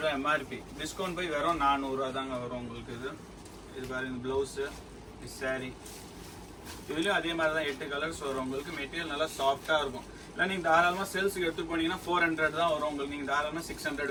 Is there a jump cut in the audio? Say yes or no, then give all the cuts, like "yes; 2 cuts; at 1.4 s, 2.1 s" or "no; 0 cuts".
no; 0 cuts